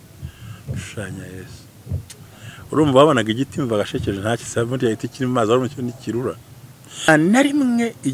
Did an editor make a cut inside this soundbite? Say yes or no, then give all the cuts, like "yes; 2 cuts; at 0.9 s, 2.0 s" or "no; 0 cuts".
no; 0 cuts